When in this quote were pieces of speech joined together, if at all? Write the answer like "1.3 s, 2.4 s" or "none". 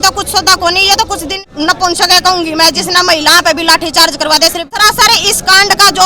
1.4 s, 4.7 s